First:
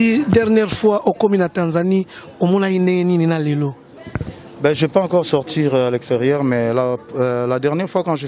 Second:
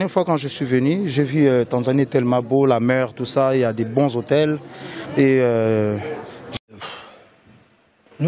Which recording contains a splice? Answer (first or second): second